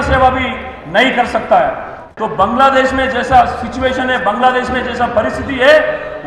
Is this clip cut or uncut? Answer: cut